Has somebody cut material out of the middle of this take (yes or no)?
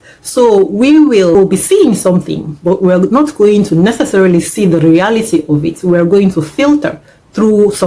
yes